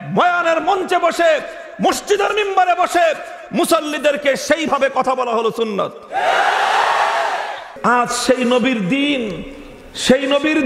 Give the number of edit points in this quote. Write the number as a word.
one